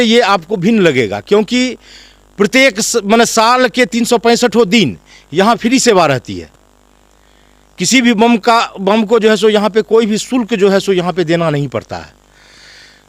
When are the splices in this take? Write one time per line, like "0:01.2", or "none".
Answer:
none